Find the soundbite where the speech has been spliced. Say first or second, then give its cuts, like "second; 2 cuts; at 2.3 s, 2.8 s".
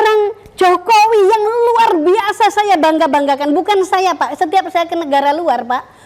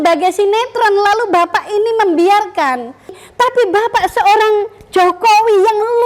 second; 1 cut; at 3.2 s